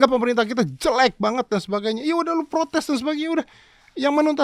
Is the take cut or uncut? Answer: uncut